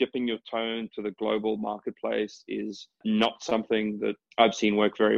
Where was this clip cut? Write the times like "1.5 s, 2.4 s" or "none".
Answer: 3.0 s, 4.2 s